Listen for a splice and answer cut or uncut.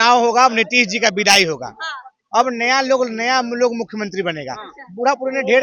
uncut